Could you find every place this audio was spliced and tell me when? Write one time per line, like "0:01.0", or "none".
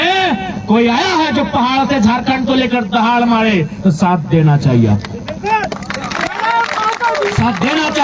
none